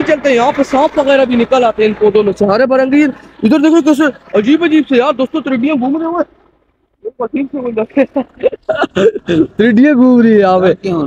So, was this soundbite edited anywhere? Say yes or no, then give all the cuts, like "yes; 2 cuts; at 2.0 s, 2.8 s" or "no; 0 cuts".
no; 0 cuts